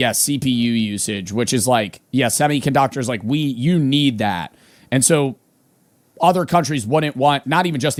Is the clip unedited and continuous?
yes; 0 cuts

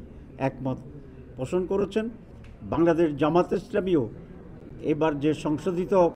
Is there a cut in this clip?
no; 0 cuts

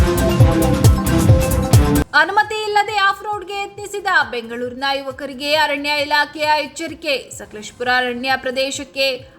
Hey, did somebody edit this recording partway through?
yes; 1 cut; at 2.0 s

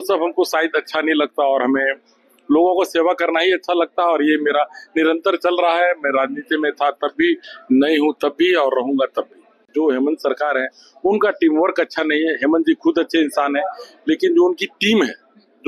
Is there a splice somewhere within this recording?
yes; 1 cut; at 9.6 s

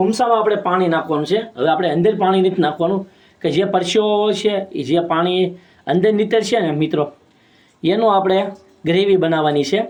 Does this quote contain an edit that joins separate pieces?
no; 0 cuts

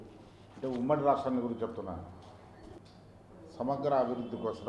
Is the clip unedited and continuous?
no; 1 cut; at 2.8 s

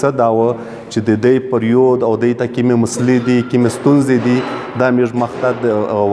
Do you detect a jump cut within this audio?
no; 0 cuts

